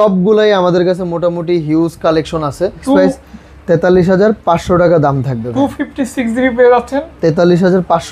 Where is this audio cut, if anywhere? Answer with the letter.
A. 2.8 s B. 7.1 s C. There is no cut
A